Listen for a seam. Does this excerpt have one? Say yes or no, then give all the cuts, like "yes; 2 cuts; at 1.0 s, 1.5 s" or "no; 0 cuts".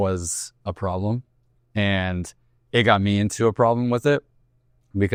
no; 0 cuts